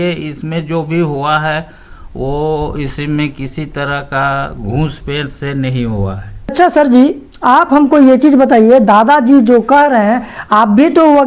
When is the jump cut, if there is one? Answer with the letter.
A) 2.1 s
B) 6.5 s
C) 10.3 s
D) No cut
B